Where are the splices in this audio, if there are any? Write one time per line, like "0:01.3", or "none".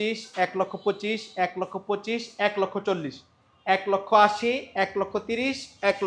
none